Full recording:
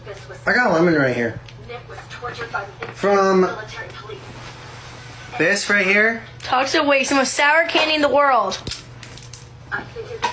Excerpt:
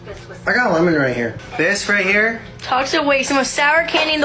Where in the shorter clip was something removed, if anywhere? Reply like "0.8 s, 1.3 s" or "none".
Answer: 1.4 s